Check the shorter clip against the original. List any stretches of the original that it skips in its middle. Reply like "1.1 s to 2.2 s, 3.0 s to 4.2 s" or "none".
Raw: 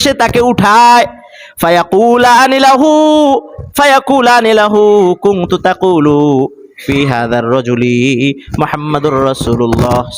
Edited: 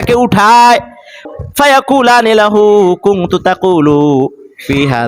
1.5 s to 3.5 s